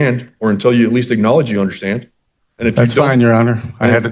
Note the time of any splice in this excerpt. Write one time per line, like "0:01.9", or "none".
none